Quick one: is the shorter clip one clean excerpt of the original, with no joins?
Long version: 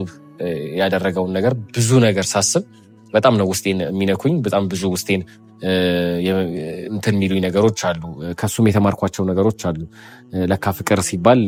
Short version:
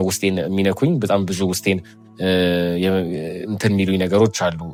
yes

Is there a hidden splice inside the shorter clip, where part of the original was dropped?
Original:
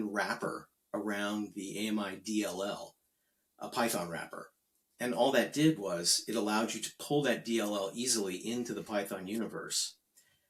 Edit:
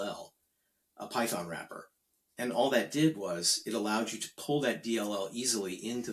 no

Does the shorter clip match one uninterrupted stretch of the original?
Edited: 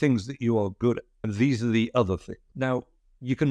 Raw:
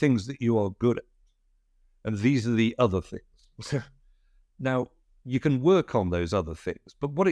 no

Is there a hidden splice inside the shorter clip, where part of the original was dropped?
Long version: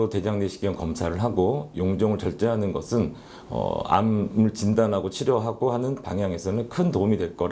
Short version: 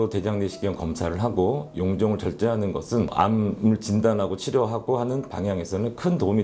yes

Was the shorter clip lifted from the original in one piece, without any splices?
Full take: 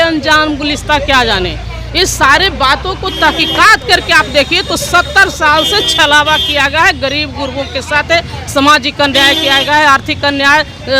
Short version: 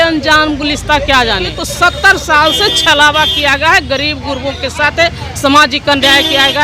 no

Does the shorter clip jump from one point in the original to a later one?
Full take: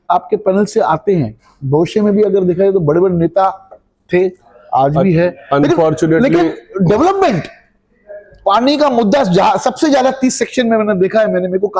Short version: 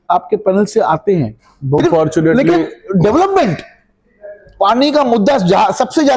yes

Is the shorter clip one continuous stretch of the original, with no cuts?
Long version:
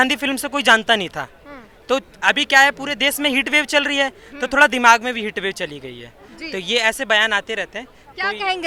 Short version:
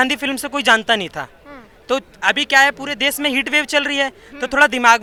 yes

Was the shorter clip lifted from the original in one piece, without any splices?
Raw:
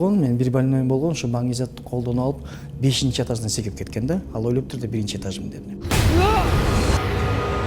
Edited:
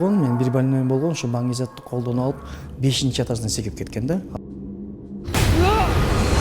no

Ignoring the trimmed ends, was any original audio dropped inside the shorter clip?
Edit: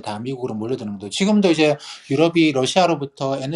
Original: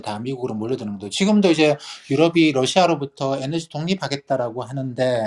no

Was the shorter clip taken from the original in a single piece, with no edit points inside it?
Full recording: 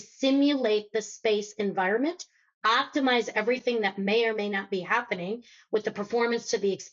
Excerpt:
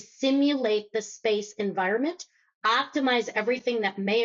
yes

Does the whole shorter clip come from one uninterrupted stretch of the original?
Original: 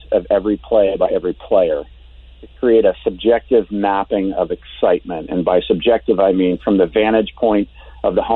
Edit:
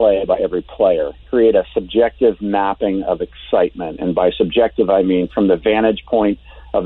no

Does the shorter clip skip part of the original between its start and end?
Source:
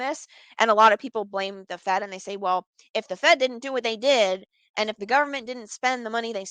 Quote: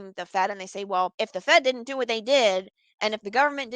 yes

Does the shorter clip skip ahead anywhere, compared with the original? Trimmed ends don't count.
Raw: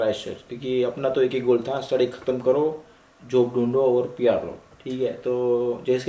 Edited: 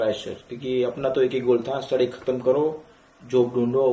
no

